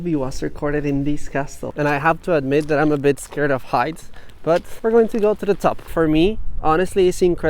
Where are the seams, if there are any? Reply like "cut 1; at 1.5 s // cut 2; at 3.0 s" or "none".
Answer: cut 1; at 1.7 s // cut 2; at 4.7 s // cut 3; at 5.9 s